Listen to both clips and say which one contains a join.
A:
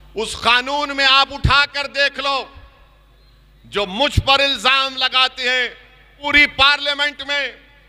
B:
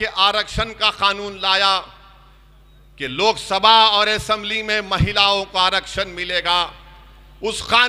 A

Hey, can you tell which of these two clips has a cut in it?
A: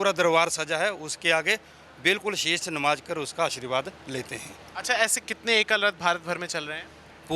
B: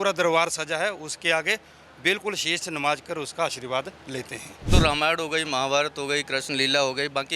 B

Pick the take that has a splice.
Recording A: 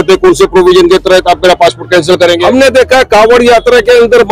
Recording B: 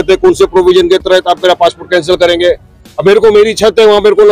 A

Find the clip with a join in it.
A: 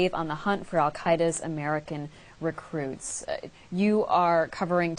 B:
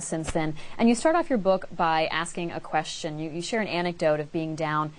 A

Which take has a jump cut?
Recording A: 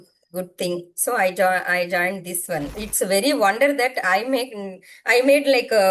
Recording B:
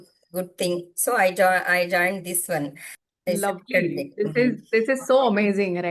A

